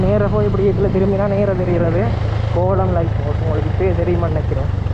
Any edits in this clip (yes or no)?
no